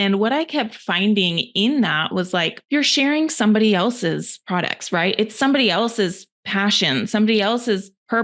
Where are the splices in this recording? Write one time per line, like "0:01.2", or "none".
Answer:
0:02.6